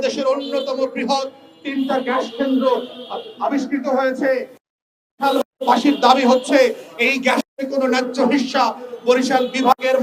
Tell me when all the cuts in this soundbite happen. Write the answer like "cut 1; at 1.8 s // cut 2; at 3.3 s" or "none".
none